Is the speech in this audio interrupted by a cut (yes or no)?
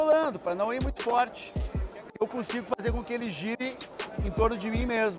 no